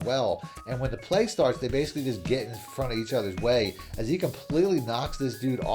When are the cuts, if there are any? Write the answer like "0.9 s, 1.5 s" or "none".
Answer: none